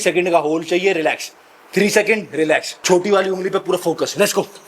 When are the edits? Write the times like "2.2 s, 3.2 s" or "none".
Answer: 2.7 s